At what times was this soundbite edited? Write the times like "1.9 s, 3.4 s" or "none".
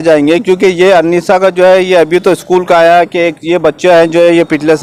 none